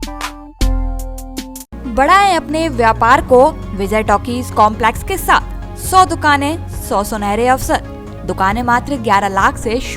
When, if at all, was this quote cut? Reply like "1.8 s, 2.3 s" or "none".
none